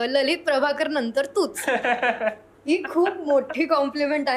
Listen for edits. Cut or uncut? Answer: uncut